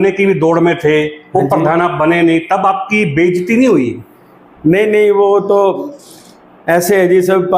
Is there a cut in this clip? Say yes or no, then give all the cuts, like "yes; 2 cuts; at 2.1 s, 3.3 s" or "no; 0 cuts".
no; 0 cuts